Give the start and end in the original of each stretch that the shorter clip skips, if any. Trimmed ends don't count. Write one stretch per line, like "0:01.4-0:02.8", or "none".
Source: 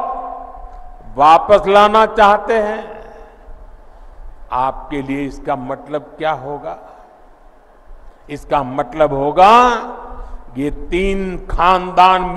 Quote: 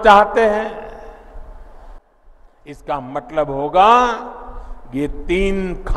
0:04.1-0:07.6